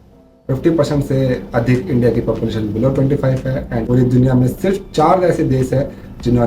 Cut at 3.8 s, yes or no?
yes